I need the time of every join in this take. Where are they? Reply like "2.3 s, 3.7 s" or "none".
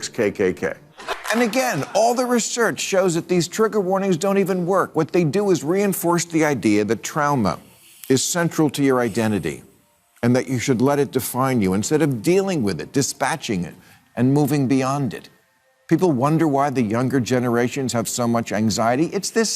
1.0 s